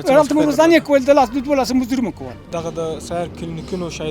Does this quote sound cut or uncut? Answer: cut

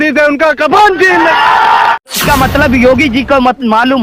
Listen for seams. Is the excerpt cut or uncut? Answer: cut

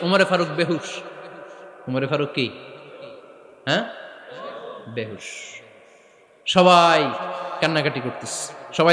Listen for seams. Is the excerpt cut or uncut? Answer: uncut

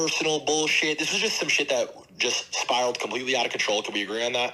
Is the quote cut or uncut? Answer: uncut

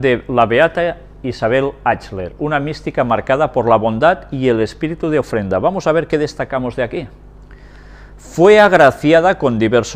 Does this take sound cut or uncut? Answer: cut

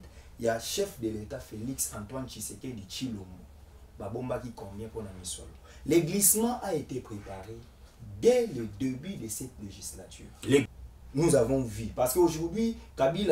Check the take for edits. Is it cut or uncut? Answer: cut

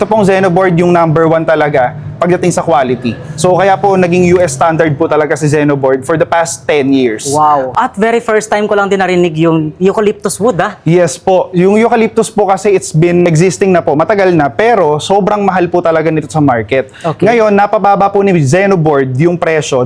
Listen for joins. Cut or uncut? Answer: cut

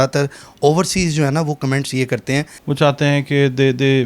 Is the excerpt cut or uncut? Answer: cut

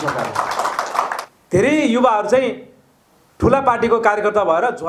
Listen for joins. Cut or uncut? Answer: cut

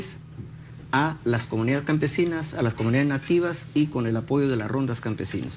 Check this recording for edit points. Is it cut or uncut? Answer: cut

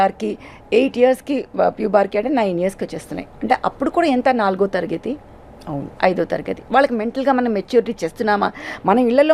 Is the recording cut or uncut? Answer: uncut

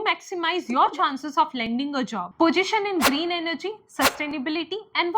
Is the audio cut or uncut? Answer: cut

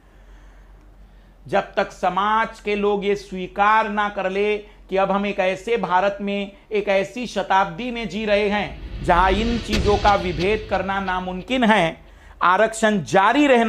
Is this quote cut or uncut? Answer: cut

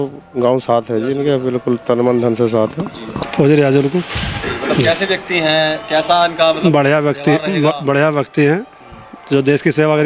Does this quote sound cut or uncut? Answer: uncut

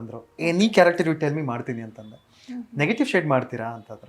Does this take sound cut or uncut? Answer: uncut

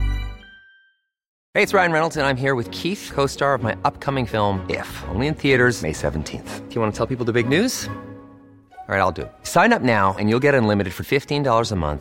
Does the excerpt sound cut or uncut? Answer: cut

